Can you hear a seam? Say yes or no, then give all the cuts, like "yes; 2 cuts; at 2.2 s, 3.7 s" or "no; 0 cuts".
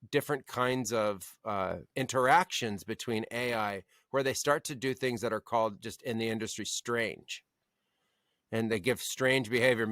yes; 1 cut; at 1.8 s